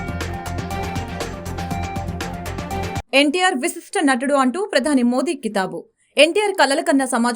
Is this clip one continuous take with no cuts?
no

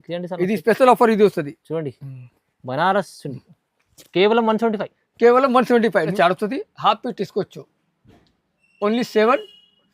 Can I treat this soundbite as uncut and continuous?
no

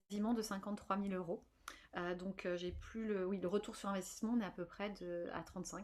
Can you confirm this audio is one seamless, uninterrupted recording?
yes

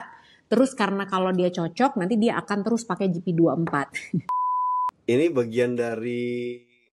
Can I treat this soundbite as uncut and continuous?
no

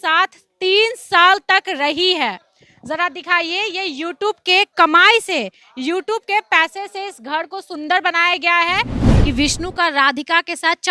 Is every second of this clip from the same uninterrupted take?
no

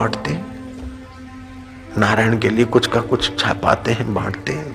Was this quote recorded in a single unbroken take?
yes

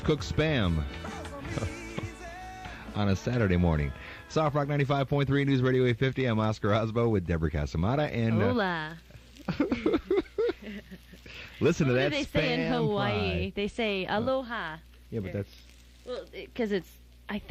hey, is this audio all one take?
yes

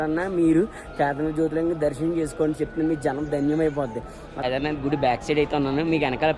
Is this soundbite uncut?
no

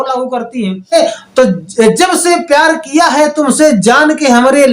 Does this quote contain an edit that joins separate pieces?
yes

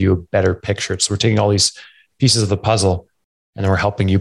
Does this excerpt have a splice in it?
no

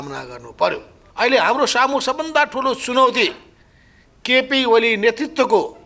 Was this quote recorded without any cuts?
no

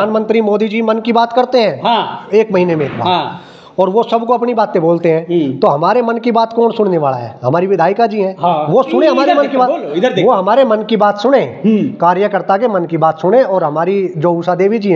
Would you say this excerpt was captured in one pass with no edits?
yes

